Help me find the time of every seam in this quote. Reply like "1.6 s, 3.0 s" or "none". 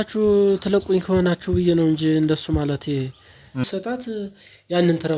3.6 s